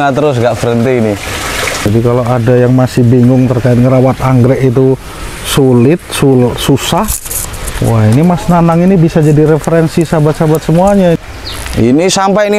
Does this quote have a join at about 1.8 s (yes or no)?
yes